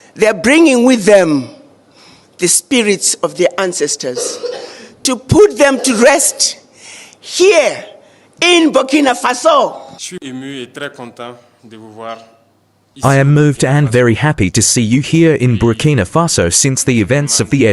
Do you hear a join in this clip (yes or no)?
yes